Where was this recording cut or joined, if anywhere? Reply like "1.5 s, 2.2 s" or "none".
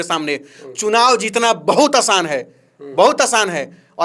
none